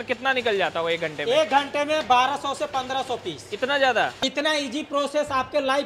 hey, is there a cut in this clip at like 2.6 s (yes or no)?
no